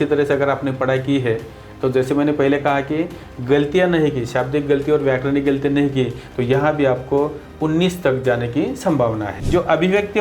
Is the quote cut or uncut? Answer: cut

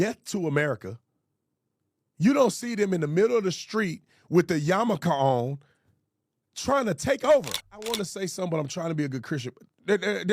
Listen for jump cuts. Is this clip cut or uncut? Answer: cut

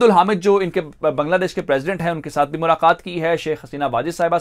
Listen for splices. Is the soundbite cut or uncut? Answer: uncut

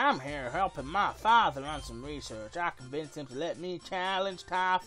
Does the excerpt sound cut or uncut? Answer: cut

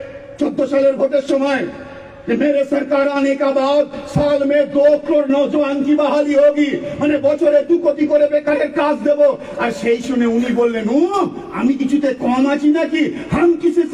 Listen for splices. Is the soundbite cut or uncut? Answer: uncut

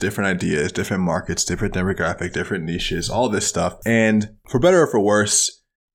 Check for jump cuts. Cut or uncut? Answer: cut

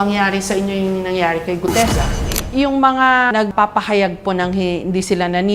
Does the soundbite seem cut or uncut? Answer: cut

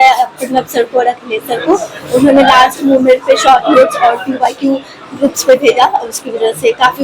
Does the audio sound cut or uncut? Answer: uncut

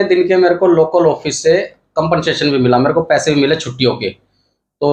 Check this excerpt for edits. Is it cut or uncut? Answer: uncut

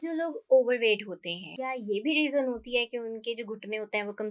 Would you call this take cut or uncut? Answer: cut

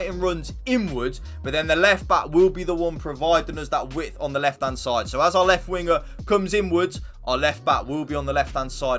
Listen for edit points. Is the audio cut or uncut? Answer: uncut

